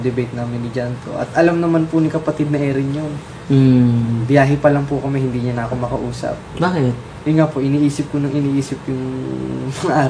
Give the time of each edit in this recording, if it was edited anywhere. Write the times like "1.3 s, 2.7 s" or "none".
none